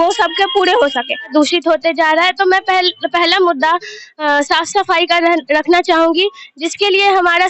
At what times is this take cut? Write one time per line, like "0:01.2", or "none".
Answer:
0:01.3